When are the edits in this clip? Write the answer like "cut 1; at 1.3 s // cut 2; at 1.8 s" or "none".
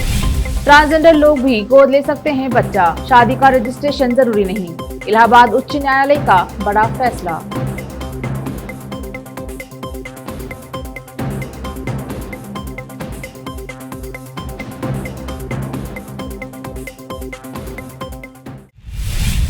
cut 1; at 18.6 s